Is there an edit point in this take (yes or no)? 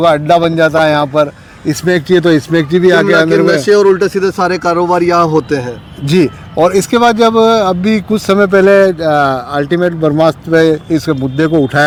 no